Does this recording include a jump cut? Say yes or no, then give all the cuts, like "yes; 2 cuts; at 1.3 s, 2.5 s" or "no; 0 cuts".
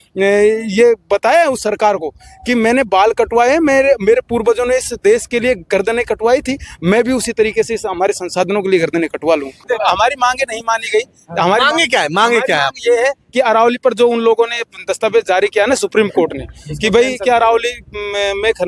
no; 0 cuts